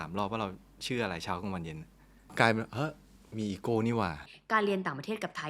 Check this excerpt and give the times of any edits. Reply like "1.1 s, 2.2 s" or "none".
4.3 s